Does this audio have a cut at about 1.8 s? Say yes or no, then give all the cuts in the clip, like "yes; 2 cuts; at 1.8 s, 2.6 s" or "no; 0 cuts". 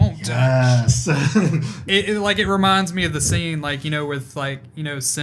yes; 1 cut; at 1.8 s